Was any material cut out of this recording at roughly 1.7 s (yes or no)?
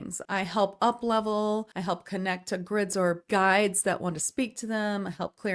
yes